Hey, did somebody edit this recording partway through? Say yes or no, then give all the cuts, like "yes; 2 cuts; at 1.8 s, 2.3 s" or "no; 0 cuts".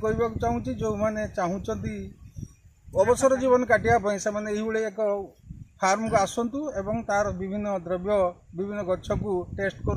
no; 0 cuts